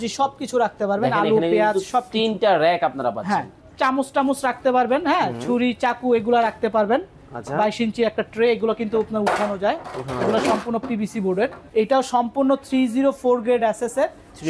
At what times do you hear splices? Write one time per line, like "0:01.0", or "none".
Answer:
0:03.6
0:11.6